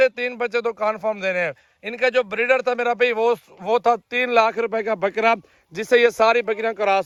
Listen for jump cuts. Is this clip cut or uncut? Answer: uncut